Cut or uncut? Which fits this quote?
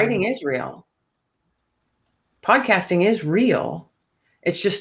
uncut